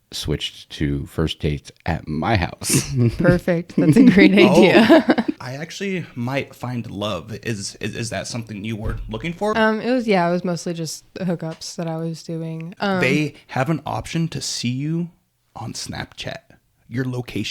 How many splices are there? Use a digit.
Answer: 3